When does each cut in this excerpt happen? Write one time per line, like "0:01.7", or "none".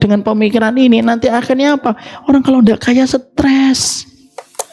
none